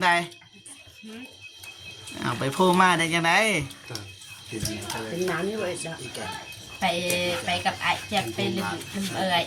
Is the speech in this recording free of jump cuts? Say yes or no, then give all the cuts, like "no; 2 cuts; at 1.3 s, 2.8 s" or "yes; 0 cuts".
yes; 0 cuts